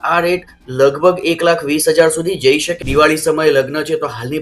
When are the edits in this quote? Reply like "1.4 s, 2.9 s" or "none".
2.7 s